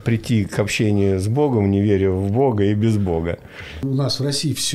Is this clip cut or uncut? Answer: cut